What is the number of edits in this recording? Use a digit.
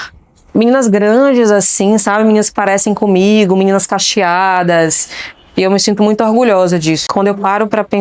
1